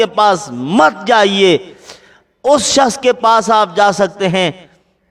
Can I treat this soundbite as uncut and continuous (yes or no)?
yes